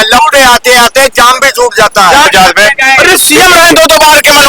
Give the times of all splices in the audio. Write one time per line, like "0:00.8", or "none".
0:02.3